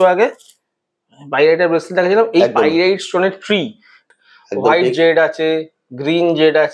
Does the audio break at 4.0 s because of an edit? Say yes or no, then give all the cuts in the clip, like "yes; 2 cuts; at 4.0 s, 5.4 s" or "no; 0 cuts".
yes; 1 cut; at 4.0 s